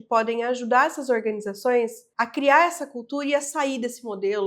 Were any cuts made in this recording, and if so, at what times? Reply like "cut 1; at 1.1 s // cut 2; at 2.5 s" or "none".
cut 1; at 2.0 s